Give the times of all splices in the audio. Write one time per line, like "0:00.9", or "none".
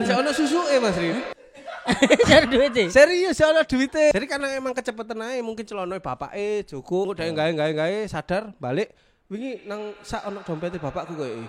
0:04.1
0:07.1